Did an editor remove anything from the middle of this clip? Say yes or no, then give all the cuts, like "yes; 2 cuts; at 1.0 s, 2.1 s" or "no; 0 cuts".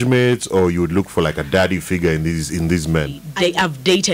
yes; 1 cut; at 3.2 s